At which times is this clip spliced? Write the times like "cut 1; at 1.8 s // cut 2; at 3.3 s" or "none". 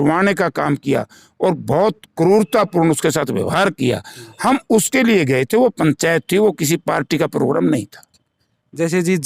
none